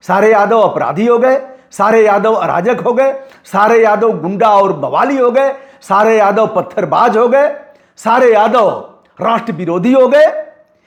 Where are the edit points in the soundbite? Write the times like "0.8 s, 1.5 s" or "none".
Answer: none

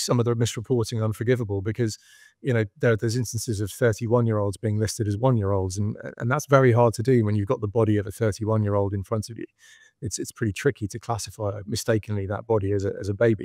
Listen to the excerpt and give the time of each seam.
none

